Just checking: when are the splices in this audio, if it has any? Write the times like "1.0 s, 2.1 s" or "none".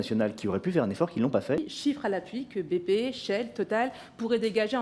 1.7 s

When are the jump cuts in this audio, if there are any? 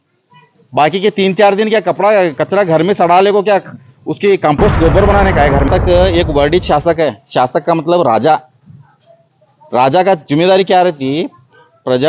5.7 s

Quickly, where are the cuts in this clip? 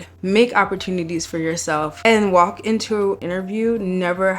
1.9 s, 3.2 s

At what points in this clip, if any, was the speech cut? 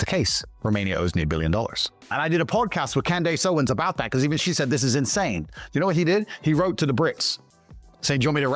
2.1 s

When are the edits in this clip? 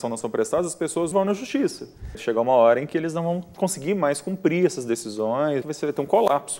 1.1 s, 2.2 s, 5.6 s

